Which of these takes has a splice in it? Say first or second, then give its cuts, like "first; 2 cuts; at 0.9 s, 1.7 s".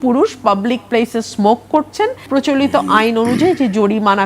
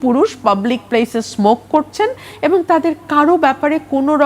first; 1 cut; at 2.3 s